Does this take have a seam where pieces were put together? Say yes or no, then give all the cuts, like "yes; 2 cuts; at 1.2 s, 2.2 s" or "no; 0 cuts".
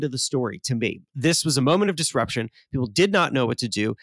yes; 1 cut; at 1.0 s